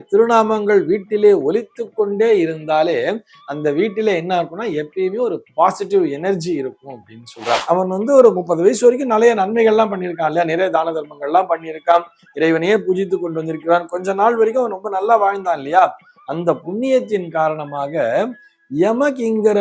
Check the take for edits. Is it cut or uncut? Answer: cut